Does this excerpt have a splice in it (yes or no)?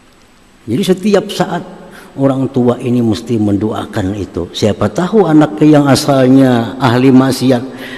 no